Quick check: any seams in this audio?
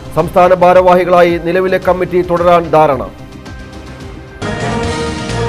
yes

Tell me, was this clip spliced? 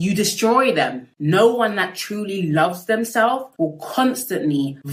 yes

